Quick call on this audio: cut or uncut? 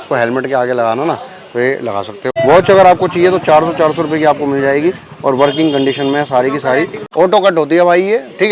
cut